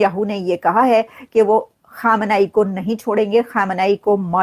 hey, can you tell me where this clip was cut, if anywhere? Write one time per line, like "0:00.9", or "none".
none